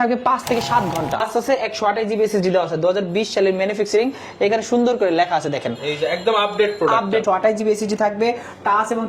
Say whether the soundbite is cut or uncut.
cut